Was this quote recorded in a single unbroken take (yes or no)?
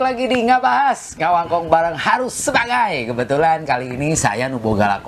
yes